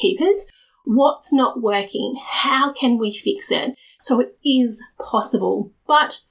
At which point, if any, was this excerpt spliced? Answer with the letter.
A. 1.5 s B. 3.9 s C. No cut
B